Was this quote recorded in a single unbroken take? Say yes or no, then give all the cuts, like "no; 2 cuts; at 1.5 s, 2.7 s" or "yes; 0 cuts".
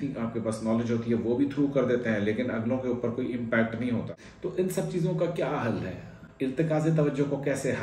no; 1 cut; at 4.2 s